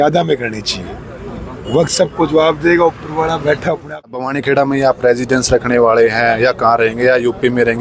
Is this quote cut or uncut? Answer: cut